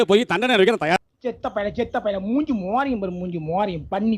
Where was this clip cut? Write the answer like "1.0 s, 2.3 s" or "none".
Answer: 1.0 s